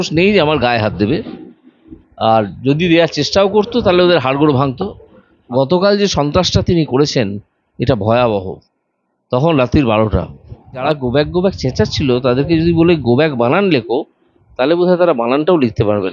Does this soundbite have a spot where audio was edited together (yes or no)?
yes